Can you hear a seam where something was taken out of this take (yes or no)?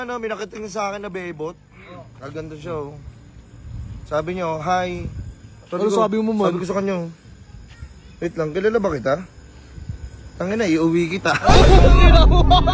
no